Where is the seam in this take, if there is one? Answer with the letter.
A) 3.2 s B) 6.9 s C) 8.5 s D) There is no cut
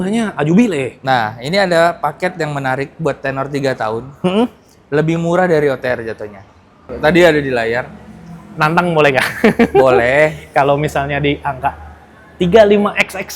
B